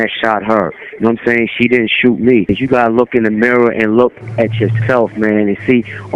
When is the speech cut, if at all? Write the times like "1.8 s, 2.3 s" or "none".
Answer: 2.5 s